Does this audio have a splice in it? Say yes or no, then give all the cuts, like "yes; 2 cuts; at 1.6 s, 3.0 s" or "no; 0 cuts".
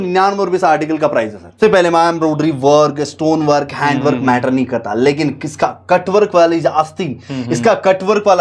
yes; 1 cut; at 1.5 s